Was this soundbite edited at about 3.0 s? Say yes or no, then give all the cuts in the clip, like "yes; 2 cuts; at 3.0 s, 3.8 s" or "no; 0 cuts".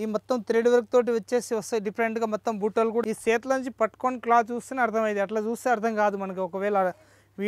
yes; 1 cut; at 3.0 s